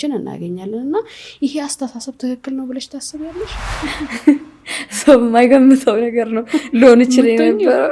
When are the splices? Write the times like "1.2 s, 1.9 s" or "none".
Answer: 3.6 s